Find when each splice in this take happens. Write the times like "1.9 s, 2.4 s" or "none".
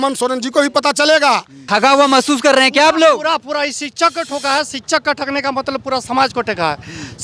1.6 s